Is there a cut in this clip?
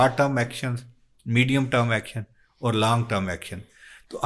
no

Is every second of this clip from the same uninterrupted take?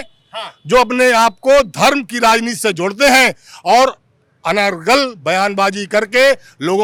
yes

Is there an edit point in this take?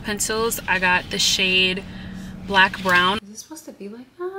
yes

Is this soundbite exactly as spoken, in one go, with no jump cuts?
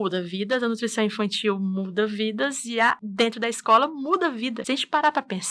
no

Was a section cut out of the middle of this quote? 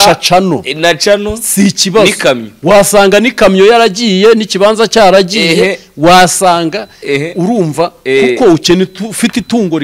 no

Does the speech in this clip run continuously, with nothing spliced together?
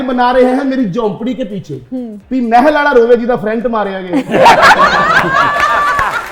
yes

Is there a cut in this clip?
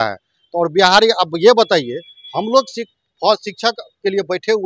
no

